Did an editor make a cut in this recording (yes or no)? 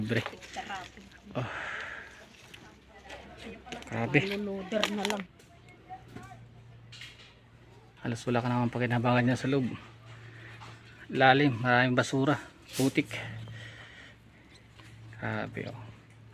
yes